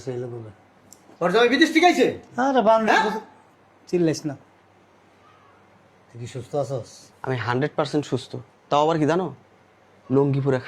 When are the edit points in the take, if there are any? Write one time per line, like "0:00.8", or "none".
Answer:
0:01.0
0:07.0